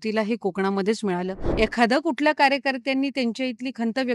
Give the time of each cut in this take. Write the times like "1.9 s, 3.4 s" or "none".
1.4 s